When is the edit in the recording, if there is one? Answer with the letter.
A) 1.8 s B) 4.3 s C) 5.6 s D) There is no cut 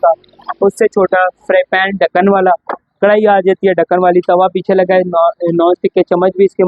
D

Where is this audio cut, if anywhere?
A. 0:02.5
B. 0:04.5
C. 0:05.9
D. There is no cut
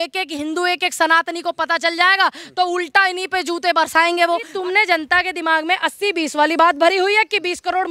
B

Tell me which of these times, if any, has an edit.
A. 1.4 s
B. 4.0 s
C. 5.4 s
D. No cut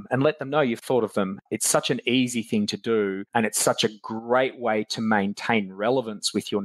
A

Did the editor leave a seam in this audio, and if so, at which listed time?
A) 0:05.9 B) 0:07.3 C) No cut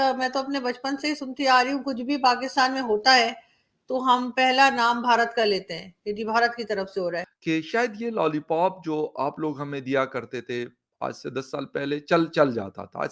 B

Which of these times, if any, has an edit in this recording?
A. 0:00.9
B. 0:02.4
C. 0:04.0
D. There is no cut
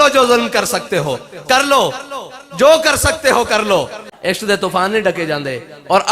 C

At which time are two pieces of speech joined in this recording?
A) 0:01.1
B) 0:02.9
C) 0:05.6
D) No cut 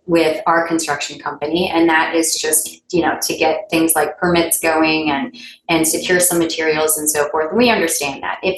D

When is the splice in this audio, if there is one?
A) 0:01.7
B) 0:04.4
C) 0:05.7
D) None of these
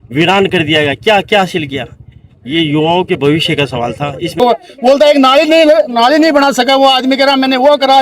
B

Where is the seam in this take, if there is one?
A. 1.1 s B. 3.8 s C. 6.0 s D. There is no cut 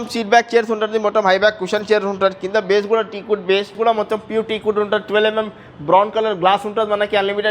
B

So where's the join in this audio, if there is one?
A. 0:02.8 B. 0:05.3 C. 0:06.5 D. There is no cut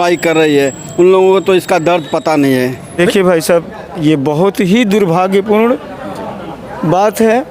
A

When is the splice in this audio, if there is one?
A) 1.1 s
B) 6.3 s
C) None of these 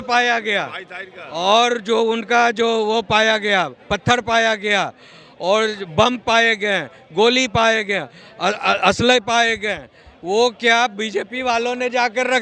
C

